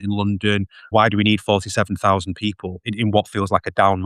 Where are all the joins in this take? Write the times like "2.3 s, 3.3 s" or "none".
0.9 s, 2.9 s